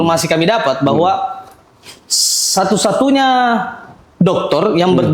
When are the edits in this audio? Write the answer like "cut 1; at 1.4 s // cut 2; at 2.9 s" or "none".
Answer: none